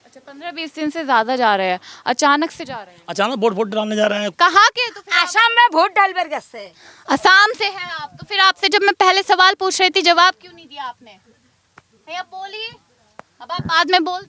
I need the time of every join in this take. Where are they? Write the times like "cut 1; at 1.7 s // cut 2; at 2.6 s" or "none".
cut 1; at 4.3 s